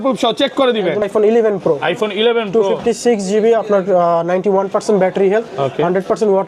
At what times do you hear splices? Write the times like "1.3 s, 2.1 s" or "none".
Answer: 1.1 s